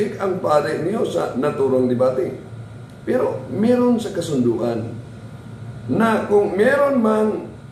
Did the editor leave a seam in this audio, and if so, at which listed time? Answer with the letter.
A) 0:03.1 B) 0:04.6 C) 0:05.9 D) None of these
D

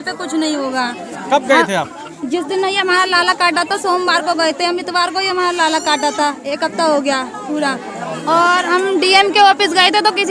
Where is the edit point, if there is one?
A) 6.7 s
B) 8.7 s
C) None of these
C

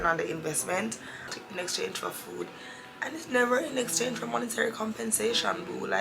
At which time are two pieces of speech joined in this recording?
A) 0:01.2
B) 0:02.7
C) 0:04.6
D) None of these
A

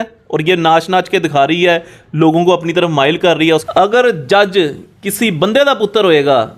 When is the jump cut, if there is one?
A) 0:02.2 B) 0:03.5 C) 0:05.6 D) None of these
B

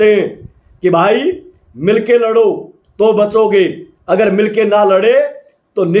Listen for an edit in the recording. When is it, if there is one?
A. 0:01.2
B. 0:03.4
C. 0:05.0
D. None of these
D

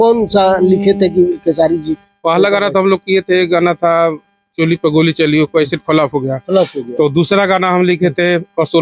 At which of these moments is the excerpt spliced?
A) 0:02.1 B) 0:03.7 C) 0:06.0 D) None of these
D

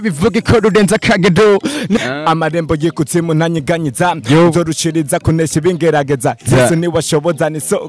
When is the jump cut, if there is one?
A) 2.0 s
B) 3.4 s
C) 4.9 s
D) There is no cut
A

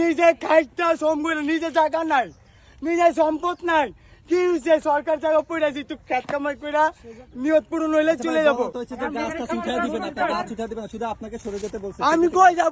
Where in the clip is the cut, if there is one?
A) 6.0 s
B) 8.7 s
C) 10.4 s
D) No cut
D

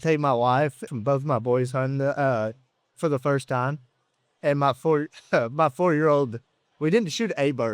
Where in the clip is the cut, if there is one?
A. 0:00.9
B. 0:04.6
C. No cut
A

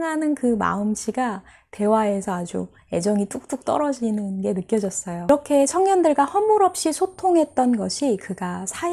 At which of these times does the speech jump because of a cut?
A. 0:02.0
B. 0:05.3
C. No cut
B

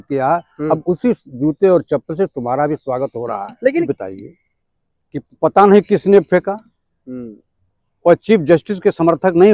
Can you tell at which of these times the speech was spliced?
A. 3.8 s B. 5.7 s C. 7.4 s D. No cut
A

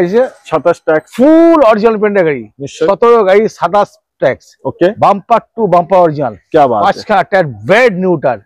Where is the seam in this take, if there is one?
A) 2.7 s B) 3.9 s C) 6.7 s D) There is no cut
D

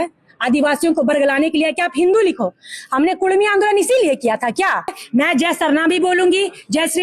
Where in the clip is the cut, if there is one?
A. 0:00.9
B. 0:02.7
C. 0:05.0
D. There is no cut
C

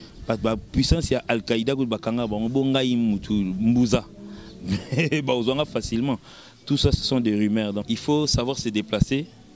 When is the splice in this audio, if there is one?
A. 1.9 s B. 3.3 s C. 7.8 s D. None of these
C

